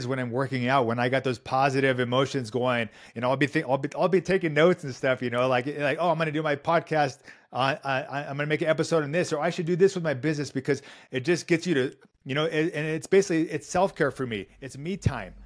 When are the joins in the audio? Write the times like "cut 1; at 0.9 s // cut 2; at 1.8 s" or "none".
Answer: none

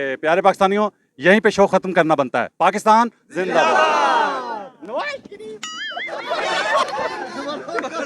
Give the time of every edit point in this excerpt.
cut 1; at 6.2 s

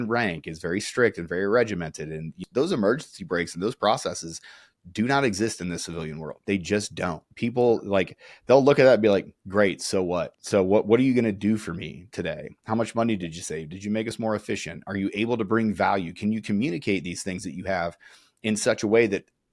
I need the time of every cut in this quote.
cut 1; at 2.4 s // cut 2; at 6.3 s // cut 3; at 10.3 s

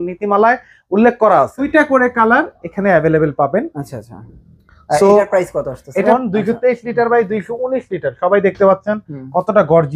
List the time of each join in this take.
cut 1; at 1.7 s // cut 2; at 6.1 s

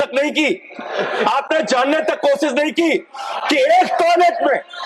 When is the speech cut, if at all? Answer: none

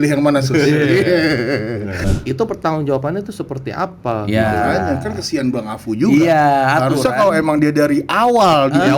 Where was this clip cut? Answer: cut 1; at 2.0 s

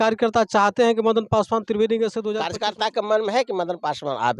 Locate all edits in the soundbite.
cut 1; at 2.3 s

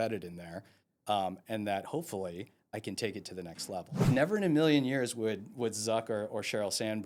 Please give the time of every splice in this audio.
cut 1; at 4.1 s

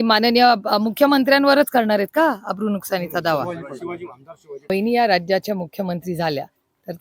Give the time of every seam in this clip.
cut 1; at 4.7 s

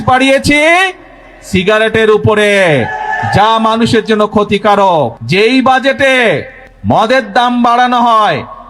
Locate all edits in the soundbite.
cut 1; at 5.2 s

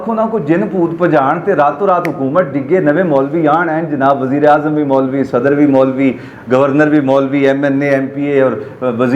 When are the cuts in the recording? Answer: none

